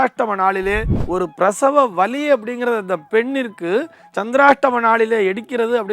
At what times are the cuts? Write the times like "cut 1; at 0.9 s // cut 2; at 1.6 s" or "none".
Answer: cut 1; at 0.9 s